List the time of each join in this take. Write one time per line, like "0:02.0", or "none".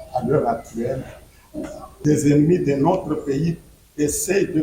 0:02.0